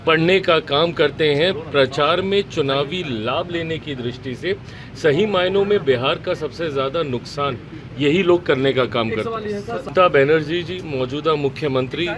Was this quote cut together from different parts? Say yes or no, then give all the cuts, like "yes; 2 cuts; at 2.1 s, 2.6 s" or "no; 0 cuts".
yes; 1 cut; at 9.9 s